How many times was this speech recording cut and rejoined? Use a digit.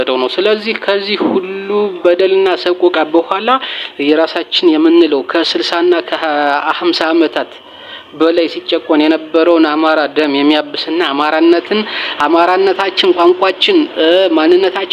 0